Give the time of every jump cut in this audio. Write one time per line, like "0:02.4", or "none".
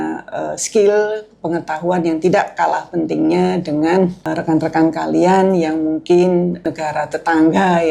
0:04.1
0:06.6